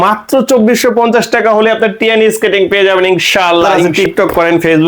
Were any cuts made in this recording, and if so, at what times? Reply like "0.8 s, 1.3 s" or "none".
3.9 s